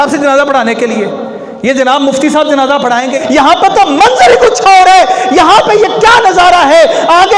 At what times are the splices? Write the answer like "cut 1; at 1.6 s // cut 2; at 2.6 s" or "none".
cut 1; at 3.1 s